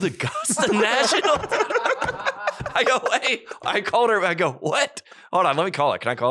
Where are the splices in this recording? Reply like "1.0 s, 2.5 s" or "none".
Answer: none